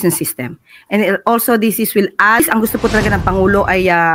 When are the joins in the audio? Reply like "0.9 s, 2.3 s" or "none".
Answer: 2.4 s